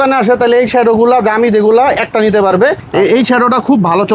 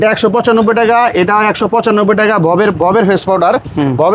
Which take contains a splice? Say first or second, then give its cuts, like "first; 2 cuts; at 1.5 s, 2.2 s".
first; 1 cut; at 2.8 s